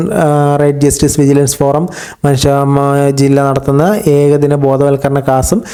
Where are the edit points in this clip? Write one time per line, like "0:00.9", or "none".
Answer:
none